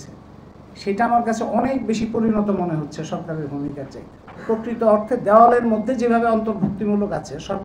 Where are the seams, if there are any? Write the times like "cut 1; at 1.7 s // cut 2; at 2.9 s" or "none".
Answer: cut 1; at 4.3 s